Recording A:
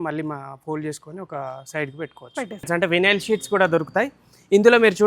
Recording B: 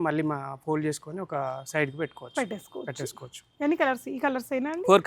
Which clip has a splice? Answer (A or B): A